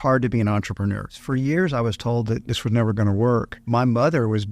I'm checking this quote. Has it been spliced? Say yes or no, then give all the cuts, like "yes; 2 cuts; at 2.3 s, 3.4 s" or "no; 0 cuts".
yes; 3 cuts; at 1.1 s, 2.5 s, 3.6 s